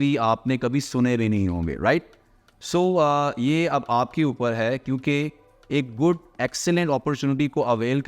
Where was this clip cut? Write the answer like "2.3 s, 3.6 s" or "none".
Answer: none

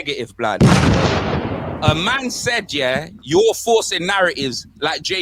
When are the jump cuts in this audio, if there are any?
none

